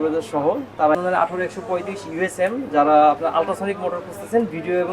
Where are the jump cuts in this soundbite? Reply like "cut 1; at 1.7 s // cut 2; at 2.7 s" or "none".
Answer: cut 1; at 0.9 s